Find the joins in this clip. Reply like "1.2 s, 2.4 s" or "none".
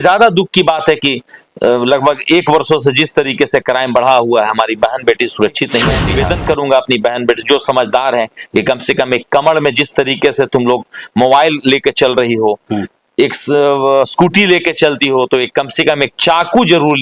6.1 s